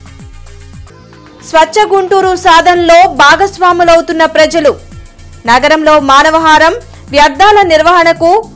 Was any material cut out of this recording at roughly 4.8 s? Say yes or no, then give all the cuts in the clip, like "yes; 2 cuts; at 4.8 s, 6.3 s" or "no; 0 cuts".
no; 1 cut; at 1.0 s